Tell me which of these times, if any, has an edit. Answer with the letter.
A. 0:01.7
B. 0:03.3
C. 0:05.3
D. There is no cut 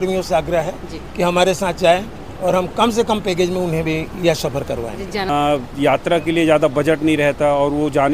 C